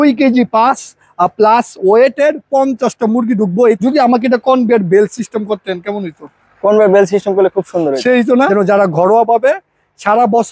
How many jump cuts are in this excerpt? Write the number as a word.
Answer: two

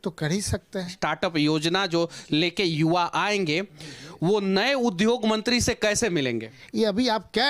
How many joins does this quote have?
two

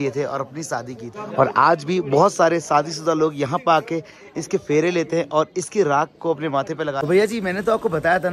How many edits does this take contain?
zero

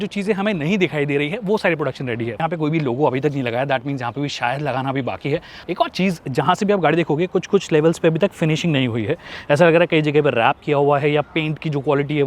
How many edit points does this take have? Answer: two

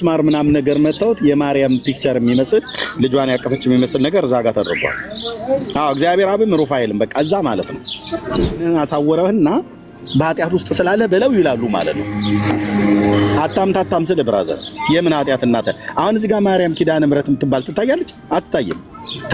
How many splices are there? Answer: one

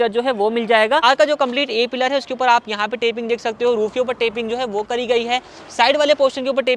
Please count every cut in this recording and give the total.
one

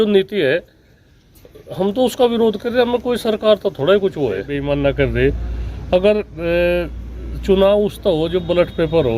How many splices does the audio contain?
one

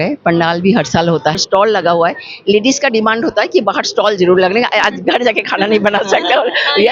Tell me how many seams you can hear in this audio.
one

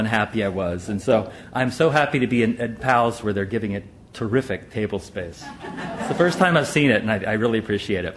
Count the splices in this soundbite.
one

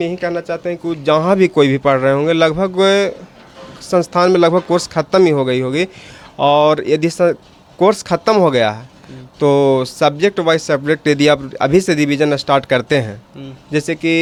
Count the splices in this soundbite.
zero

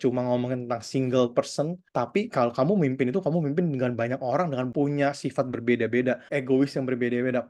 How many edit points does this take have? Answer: three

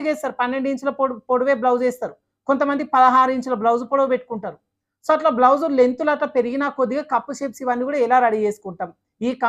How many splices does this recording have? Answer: zero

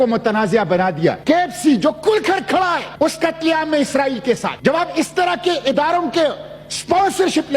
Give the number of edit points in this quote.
three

